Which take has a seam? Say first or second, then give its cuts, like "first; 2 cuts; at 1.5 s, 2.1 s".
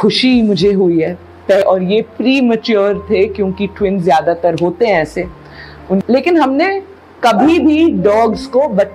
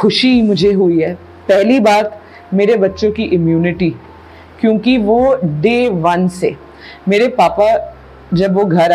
first; 2 cuts; at 1.6 s, 6.0 s